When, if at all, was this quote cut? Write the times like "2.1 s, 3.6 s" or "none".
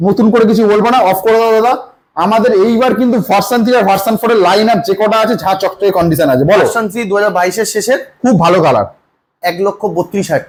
none